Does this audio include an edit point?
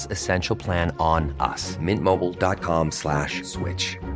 no; 0 cuts

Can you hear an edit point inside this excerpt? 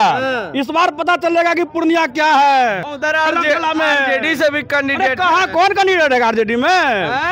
yes; 1 cut; at 2.8 s

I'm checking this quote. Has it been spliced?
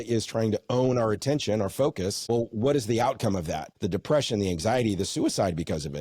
yes; 2 cuts; at 2.2 s, 3.7 s

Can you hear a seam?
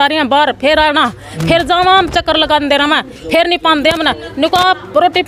no; 0 cuts

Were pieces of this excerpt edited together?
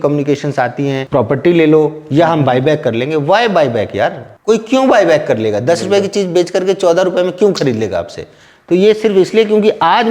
yes; 2 cuts; at 1.0 s, 4.3 s

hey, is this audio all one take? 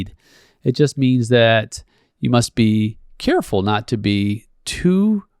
yes; 0 cuts

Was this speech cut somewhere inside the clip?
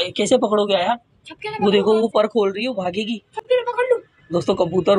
no; 0 cuts

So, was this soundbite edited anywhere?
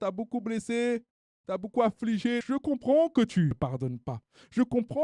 yes; 2 cuts; at 2.4 s, 3.6 s

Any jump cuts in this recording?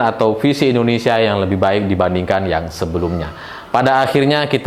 no; 0 cuts

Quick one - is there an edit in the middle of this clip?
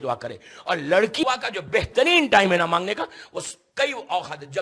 yes; 1 cut; at 1.2 s

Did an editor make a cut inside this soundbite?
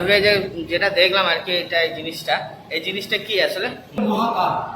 no; 0 cuts

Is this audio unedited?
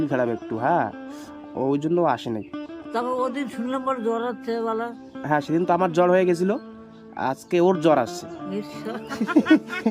yes; 0 cuts

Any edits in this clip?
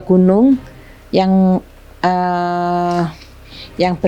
no; 0 cuts

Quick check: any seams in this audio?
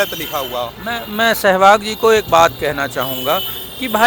no; 0 cuts

